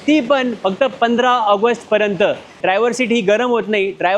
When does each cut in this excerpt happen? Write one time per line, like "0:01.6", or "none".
0:02.6